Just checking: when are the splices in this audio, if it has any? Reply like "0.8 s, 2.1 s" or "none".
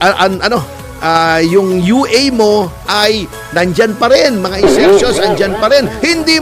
none